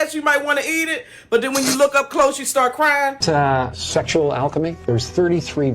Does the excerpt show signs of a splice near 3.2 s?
yes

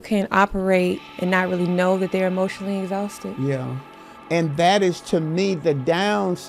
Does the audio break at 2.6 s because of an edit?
no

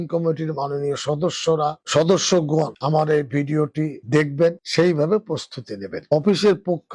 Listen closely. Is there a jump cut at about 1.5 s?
no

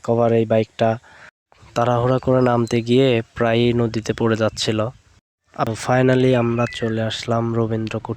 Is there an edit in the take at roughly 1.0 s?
no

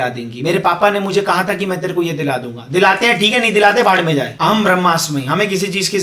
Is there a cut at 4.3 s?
yes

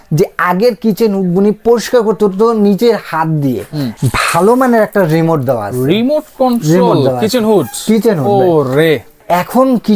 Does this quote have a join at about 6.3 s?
no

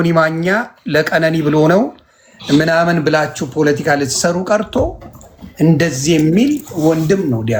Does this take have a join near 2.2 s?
no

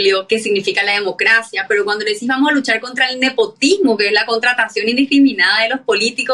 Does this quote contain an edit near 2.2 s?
no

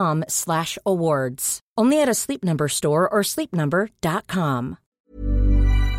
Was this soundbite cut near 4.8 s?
yes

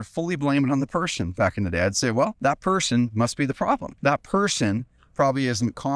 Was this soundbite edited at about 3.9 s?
yes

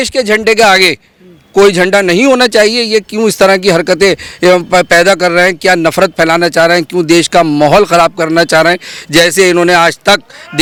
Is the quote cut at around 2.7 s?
no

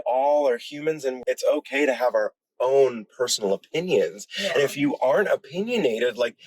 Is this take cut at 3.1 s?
no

